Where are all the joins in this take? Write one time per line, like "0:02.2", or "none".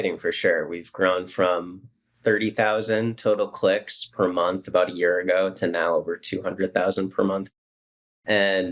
0:07.5